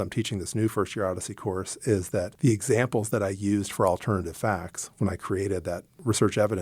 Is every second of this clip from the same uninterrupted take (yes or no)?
yes